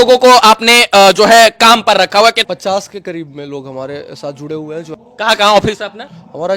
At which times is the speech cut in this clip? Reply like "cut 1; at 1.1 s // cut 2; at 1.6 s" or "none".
cut 1; at 2.4 s // cut 2; at 4.9 s